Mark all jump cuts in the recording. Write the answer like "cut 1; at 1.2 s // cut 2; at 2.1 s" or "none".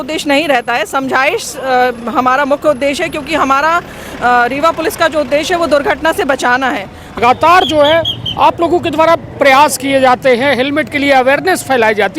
cut 1; at 7.2 s